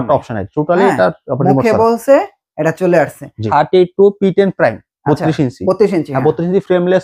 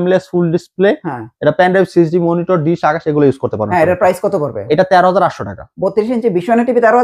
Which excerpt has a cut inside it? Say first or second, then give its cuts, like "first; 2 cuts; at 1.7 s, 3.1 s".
first; 1 cut; at 3.4 s